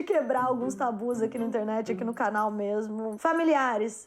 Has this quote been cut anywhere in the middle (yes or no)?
yes